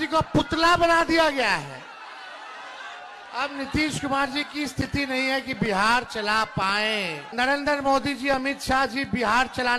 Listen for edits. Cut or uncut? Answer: cut